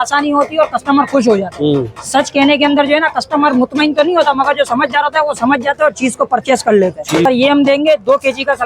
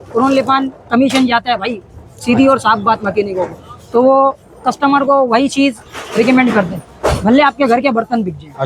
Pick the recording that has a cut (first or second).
first